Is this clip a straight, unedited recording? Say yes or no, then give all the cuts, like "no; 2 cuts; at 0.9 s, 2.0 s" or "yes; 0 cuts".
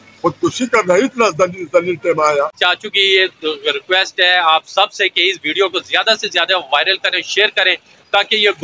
no; 1 cut; at 2.5 s